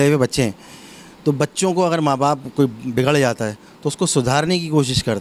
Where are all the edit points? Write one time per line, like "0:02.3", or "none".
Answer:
none